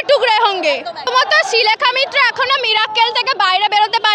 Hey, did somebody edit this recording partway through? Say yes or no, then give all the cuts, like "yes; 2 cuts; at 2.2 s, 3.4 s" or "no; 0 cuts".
no; 0 cuts